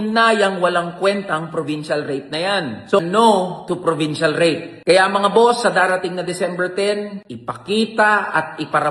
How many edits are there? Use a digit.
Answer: 1